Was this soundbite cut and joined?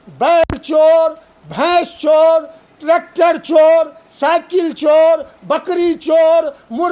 no; 0 cuts

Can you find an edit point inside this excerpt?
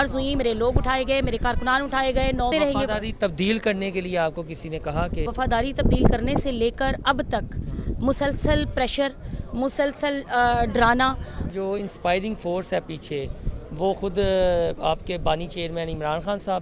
yes; 3 cuts; at 2.5 s, 5.3 s, 11.4 s

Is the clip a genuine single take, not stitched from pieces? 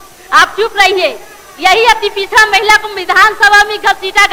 yes; 0 cuts

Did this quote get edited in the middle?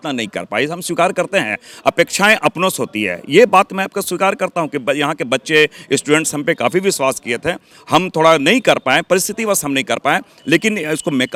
no; 0 cuts

